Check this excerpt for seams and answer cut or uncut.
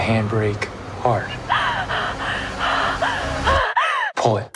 uncut